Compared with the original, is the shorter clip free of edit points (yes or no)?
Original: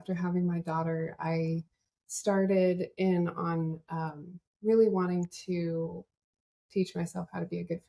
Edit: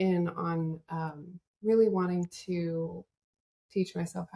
yes